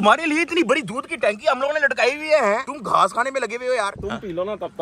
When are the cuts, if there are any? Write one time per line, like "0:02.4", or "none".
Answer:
0:03.9